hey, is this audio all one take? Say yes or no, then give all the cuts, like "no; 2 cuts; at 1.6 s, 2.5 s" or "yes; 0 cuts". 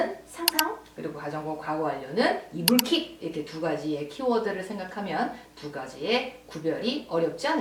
yes; 0 cuts